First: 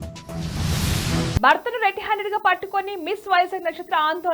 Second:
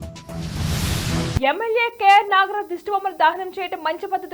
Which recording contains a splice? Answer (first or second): second